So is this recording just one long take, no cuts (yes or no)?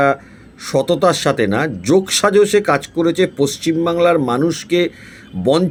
yes